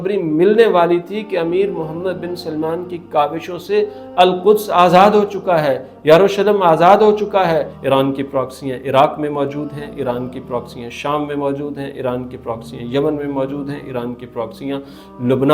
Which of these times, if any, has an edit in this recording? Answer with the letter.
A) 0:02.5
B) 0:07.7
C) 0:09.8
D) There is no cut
B